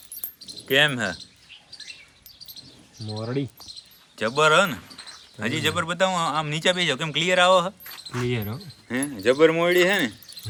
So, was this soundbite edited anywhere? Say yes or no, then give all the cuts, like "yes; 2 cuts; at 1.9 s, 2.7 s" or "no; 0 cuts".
no; 0 cuts